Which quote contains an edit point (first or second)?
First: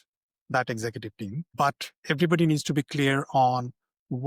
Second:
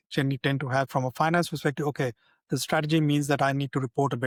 first